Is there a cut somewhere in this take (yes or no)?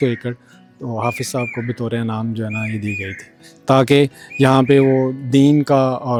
no